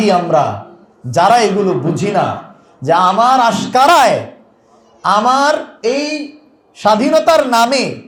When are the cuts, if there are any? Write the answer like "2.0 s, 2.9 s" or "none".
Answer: none